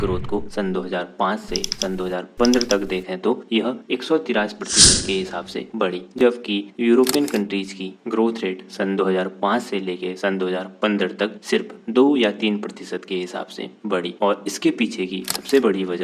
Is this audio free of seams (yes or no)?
yes